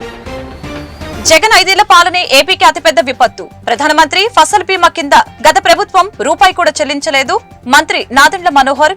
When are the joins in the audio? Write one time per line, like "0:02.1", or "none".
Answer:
0:01.1